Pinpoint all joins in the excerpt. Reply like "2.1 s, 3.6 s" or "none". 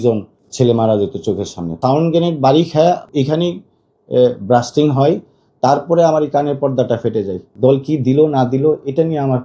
1.7 s, 3.0 s, 7.4 s